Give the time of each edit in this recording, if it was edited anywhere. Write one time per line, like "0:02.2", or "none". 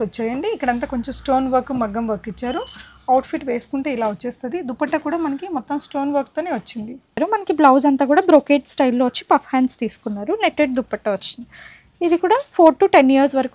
0:07.1